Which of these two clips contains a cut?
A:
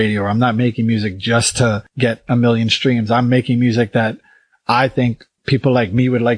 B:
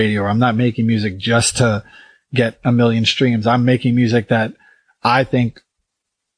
A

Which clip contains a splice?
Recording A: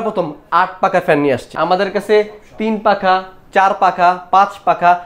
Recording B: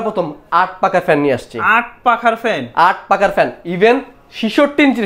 A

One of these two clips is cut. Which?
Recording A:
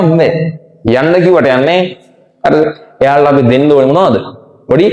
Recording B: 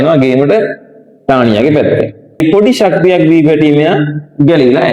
B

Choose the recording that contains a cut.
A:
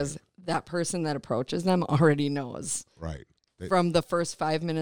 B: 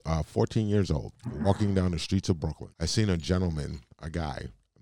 B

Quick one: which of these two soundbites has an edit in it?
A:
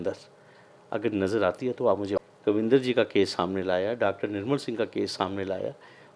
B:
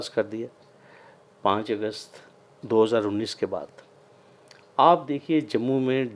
A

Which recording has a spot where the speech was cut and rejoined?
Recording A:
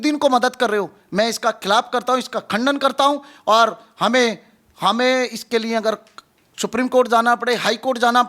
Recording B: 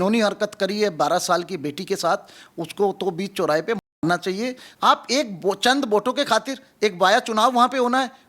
B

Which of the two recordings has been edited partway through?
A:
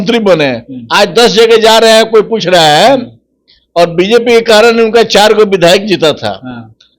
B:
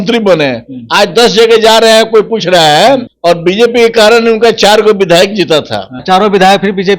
B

